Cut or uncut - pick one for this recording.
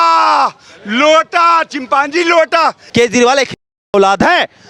cut